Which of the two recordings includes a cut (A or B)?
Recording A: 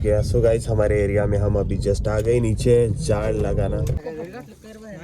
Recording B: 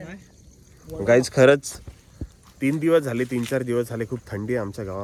A